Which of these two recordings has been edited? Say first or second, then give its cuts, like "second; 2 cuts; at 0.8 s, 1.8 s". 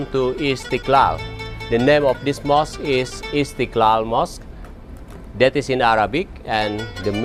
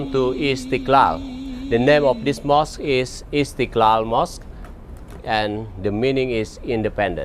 second; 1 cut; at 5.2 s